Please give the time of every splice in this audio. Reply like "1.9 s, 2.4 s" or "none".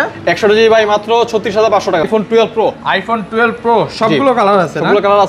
2.0 s

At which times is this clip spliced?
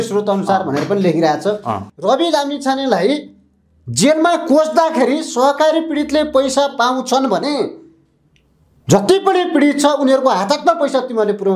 1.8 s

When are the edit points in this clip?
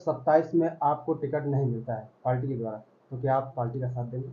none

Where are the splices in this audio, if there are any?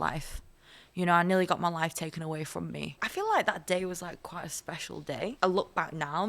3.0 s, 5.3 s

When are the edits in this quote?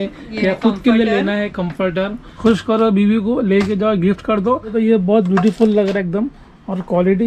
2.2 s, 4.7 s

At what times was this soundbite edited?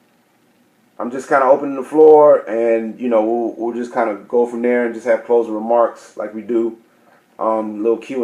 2.9 s

